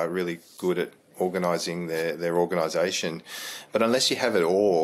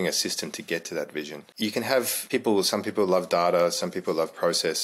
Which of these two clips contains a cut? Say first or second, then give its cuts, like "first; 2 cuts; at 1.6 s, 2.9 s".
second; 2 cuts; at 1.4 s, 2.2 s